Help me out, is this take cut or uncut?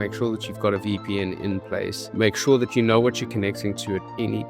cut